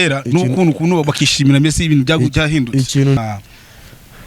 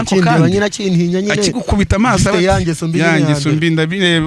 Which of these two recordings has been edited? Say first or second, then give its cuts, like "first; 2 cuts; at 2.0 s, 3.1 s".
first; 1 cut; at 3.2 s